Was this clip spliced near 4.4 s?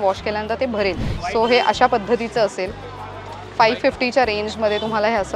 no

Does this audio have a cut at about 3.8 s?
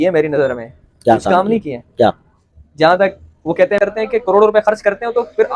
yes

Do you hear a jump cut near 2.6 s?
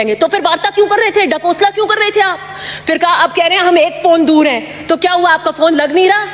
no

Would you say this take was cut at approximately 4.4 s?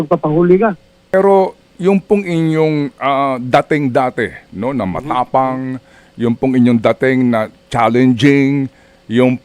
no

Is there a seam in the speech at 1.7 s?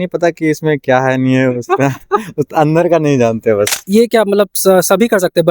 no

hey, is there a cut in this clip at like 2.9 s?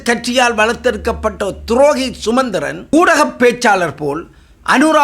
yes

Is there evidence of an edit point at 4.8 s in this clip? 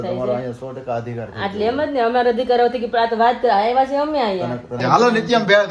yes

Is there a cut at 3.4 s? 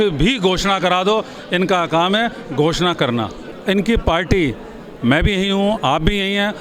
yes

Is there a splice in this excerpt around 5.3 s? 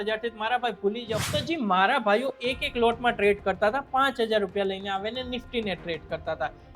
no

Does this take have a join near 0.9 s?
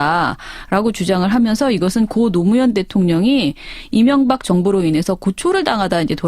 no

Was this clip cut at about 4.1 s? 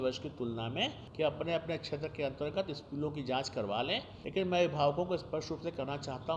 yes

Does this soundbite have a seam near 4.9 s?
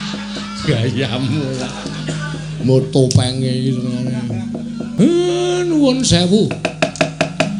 yes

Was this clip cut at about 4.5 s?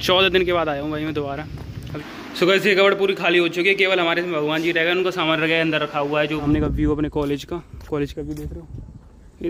no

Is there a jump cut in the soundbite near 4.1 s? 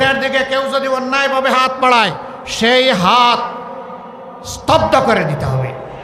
no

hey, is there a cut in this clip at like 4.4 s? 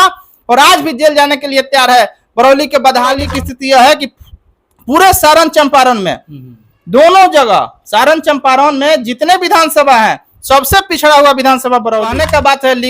no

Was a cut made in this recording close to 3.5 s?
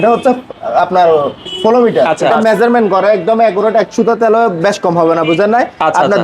no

